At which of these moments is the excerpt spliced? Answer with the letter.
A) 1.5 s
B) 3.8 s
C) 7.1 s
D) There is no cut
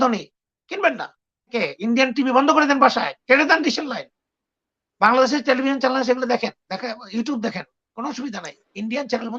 A